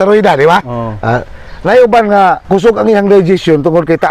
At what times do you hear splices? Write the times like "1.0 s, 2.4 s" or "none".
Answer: 2.4 s

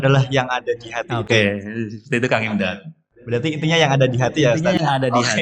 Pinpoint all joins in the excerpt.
none

